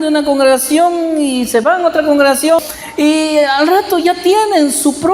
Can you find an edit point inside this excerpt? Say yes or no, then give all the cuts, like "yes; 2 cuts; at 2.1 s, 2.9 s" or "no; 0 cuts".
yes; 1 cut; at 2.6 s